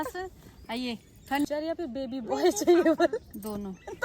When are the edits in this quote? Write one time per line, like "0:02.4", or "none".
0:01.4